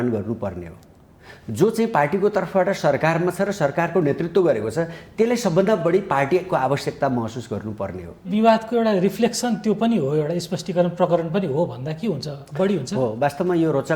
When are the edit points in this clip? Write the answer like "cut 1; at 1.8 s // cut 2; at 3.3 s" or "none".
cut 1; at 8.3 s